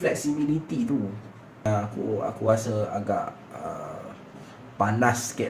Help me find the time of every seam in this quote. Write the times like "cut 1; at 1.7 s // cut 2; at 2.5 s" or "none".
cut 1; at 1.7 s